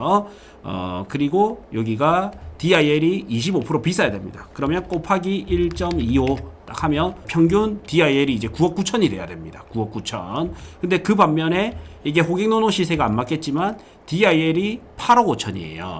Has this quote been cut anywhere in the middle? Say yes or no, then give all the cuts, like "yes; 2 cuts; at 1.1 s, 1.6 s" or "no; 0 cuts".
yes; 1 cut; at 7.2 s